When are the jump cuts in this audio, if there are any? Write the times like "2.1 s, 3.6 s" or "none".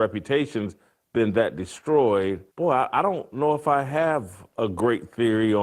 2.5 s